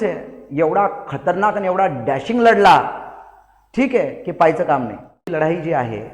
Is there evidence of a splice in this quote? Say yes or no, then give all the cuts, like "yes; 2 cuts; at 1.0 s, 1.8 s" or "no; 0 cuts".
yes; 1 cut; at 5.2 s